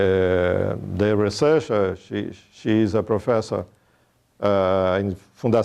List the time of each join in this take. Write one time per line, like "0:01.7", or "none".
0:03.4